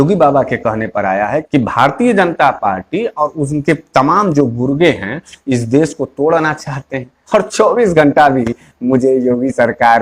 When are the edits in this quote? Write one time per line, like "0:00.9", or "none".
0:01.4
0:07.2